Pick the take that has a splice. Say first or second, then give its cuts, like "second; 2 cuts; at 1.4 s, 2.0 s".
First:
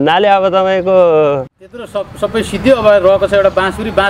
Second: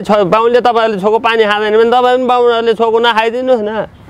first; 1 cut; at 1.5 s